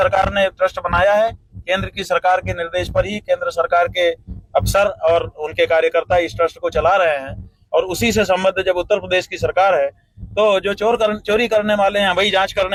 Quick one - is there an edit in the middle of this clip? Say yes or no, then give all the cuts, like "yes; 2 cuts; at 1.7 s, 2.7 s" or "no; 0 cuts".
no; 0 cuts